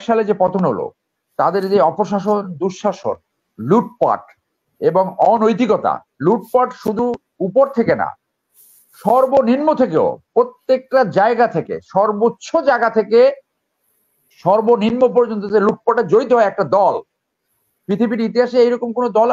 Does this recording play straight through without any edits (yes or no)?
yes